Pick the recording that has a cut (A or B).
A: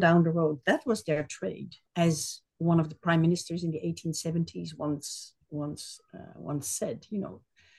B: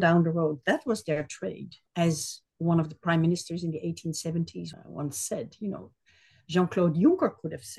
B